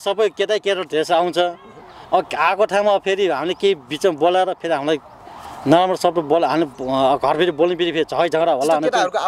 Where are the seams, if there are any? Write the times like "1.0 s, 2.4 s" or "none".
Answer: none